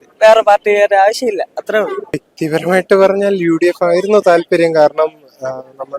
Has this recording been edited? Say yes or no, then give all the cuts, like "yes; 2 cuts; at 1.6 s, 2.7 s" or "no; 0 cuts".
yes; 1 cut; at 2.3 s